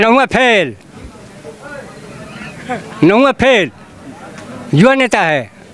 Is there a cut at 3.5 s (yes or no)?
no